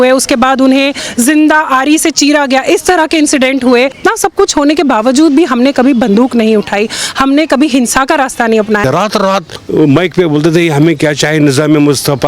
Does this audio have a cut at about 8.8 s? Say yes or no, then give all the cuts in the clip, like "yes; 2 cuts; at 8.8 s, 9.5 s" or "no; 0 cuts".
yes; 2 cuts; at 4.0 s, 8.8 s